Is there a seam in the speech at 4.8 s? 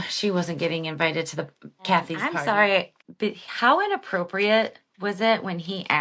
no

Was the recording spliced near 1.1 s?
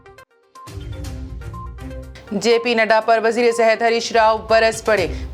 yes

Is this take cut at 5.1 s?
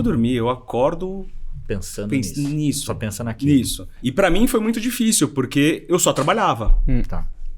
no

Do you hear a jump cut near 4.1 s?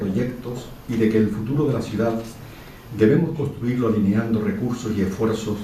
no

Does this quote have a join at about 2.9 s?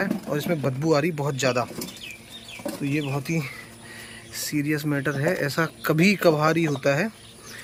no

